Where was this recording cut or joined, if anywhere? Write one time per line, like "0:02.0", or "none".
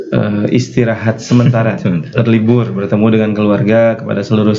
none